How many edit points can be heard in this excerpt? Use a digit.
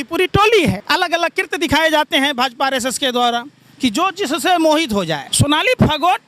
2